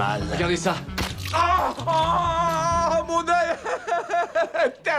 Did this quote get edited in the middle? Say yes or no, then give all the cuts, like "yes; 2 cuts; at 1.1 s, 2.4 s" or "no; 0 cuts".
yes; 1 cut; at 3.4 s